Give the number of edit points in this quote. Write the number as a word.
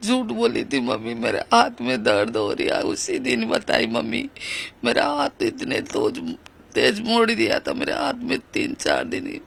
zero